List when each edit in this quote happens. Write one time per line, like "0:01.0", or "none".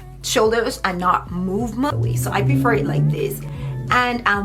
0:01.9

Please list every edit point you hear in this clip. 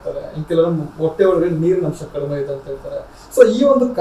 none

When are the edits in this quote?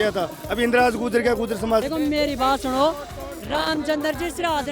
0:01.8

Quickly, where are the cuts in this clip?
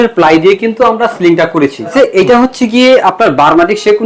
0:01.9

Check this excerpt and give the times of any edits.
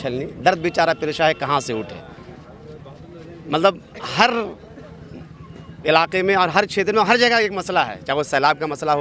none

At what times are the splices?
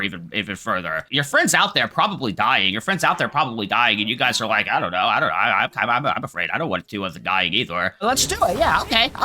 0:01.1
0:08.0

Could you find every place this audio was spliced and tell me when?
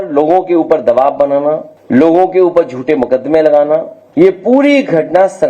0:01.7
0:04.0

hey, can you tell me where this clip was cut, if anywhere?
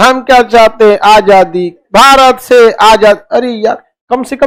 none

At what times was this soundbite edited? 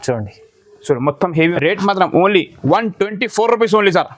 0:01.4

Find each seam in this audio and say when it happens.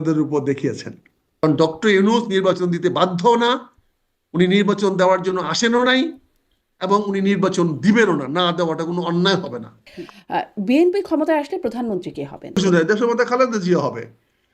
0:01.4
0:09.9
0:12.6

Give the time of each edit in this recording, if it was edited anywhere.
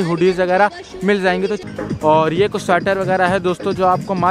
0:01.6

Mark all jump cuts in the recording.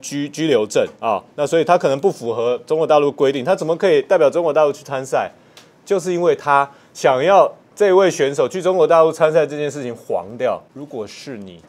0:10.7

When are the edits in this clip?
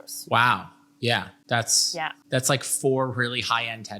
0:01.8

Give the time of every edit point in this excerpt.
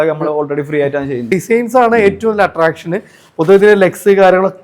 0:01.3

